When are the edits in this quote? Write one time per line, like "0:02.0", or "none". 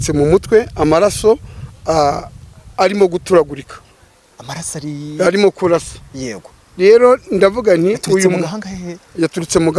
none